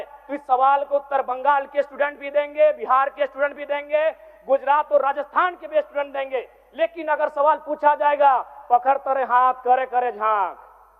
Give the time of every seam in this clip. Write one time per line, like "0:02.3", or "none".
none